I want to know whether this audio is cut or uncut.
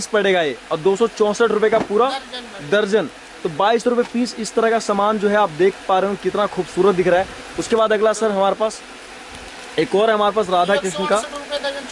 uncut